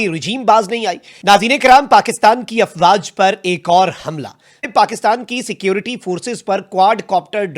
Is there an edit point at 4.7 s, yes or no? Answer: yes